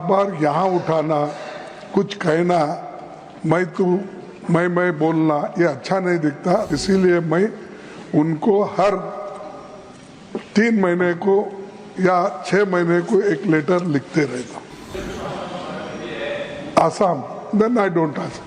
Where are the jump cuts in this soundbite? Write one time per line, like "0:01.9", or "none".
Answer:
0:06.7
0:14.9